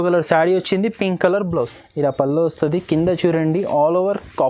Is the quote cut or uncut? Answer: cut